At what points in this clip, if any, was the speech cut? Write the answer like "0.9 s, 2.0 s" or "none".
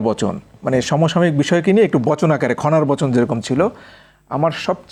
none